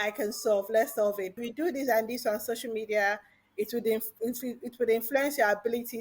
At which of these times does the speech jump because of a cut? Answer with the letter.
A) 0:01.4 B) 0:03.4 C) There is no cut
A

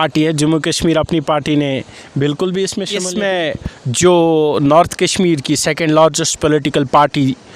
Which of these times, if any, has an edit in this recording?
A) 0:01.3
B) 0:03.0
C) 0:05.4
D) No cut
B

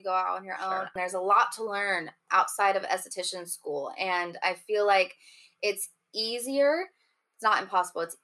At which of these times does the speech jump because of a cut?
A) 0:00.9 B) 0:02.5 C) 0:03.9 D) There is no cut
A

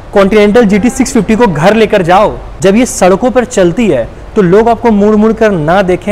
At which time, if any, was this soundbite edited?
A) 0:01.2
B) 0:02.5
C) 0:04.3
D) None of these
B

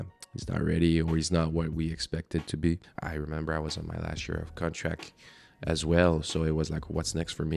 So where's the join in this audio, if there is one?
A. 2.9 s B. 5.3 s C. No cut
A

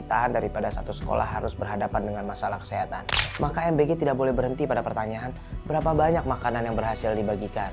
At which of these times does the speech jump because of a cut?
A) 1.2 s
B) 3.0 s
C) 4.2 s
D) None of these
B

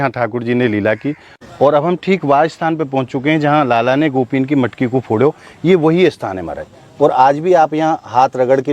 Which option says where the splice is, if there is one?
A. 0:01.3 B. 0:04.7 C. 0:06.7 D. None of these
A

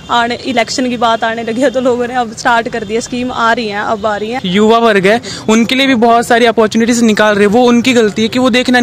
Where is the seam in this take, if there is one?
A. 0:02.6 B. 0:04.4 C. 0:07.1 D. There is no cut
B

